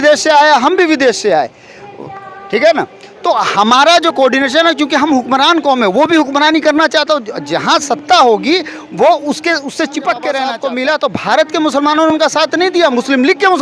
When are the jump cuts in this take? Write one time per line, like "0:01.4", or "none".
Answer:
0:10.6